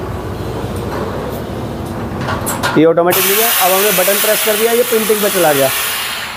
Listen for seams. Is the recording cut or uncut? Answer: uncut